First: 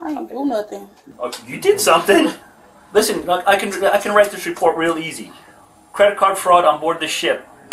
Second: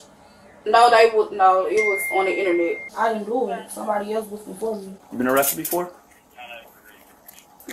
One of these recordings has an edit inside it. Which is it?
second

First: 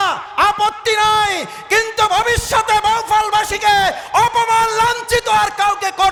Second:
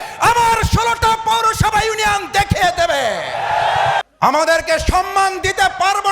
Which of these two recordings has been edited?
second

